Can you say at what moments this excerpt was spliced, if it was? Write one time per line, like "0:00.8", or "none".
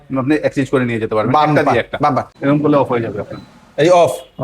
0:02.3